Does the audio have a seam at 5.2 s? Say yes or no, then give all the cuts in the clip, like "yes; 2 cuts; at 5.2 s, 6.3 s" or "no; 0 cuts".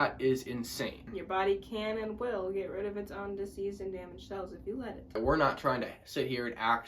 yes; 2 cuts; at 1.1 s, 5.2 s